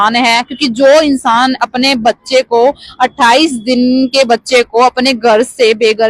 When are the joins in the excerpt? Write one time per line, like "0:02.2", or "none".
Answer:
none